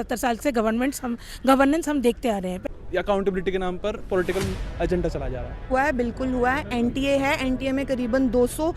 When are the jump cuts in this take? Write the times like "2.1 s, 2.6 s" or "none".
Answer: 2.6 s, 5.6 s